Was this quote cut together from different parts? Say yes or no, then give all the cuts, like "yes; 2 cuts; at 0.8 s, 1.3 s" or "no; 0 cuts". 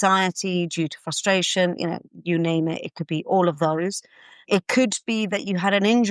yes; 1 cut; at 4.4 s